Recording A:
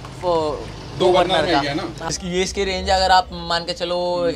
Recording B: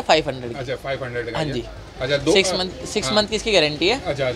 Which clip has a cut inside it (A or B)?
A